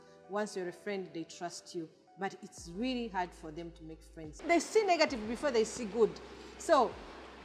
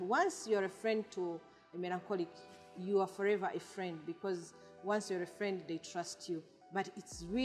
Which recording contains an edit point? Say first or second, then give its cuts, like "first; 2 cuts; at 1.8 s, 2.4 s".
first; 1 cut; at 4.4 s